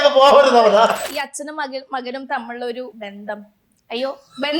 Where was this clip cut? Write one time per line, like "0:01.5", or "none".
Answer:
0:01.0
0:03.0